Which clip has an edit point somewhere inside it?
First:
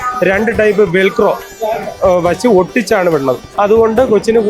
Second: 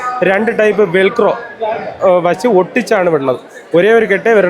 first; 1 cut; at 3.5 s

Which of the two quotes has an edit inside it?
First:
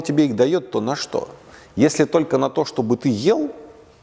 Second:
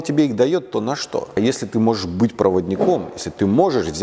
second; 1 cut; at 1.4 s

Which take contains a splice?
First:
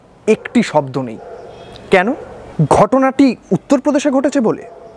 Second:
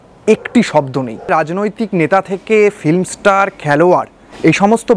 second; 1 cut; at 1.3 s

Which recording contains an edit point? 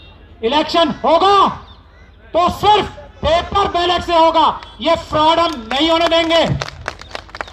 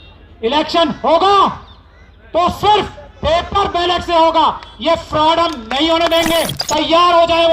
second; 1 cut; at 6.6 s

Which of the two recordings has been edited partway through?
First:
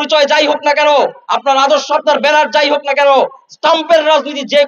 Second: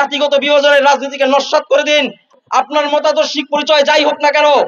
second; 1 cut; at 2.3 s

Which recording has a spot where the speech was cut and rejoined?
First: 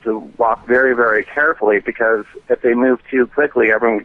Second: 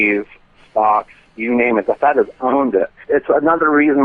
second; 1 cut; at 3.0 s

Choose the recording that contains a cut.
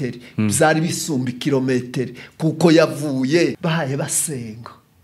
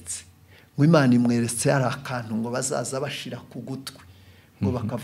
first; 1 cut; at 3.6 s

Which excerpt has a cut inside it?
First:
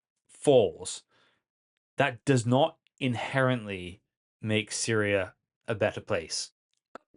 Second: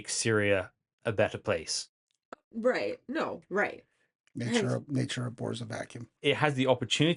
second; 1 cut; at 6.2 s

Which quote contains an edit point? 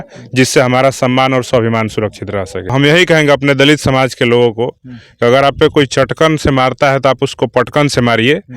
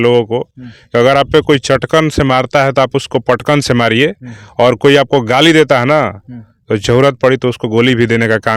first; 1 cut; at 2.7 s

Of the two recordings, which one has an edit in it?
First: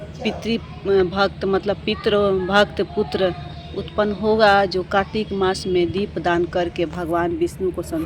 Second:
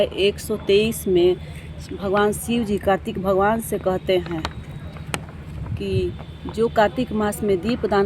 second; 1 cut; at 3.6 s

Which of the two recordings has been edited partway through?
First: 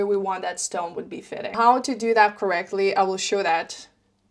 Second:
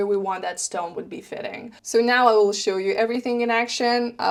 first; 1 cut; at 1.5 s

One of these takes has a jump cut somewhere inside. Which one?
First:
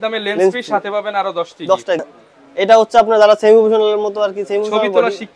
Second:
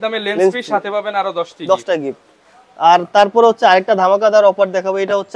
first; 1 cut; at 2.0 s

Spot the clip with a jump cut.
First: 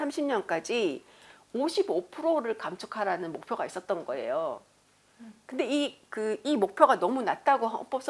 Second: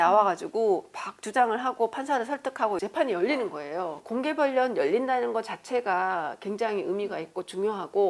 second; 2 cuts; at 2.8 s, 4.0 s

